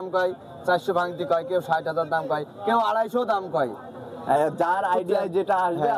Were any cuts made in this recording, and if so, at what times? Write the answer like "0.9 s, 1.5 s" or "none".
none